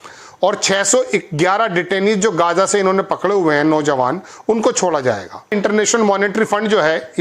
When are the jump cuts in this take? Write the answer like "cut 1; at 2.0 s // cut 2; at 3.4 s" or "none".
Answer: cut 1; at 5.5 s